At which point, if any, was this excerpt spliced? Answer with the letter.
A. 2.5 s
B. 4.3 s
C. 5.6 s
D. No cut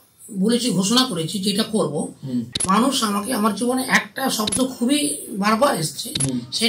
A